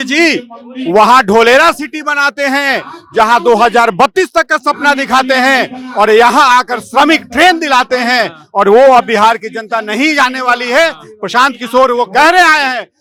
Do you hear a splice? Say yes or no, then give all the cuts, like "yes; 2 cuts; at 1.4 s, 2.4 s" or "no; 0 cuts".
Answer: no; 0 cuts